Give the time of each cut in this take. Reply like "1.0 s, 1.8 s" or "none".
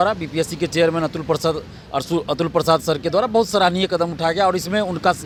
none